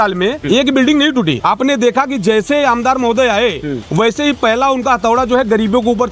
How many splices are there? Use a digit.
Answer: 0